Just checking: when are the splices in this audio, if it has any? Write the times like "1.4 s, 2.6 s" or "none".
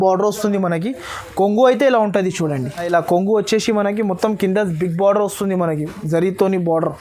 2.9 s